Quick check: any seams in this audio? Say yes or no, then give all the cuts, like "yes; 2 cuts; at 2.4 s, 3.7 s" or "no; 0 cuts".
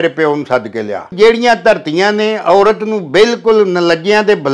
yes; 1 cut; at 1.1 s